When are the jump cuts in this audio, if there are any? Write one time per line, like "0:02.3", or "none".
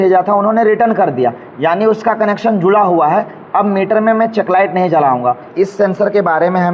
0:05.5